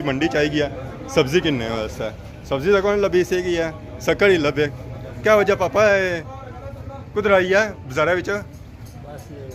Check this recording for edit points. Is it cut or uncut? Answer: uncut